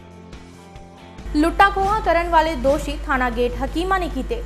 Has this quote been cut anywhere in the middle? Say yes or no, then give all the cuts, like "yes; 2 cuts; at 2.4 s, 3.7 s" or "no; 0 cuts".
yes; 1 cut; at 1.2 s